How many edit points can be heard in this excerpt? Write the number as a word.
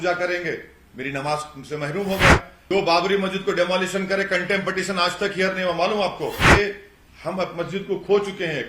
two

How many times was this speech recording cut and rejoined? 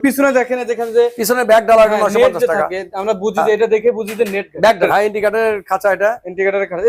one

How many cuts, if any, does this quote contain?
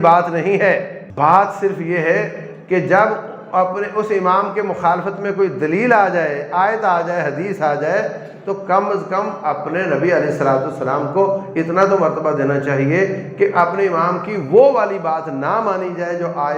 one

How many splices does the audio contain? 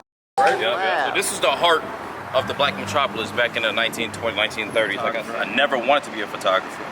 two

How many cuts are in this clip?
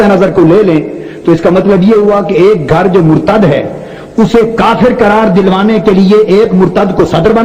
zero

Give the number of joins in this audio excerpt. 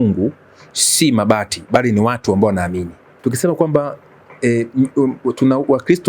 one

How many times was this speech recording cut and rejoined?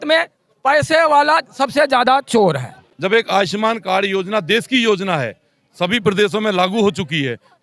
one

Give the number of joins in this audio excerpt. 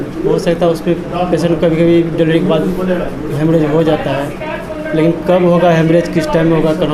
zero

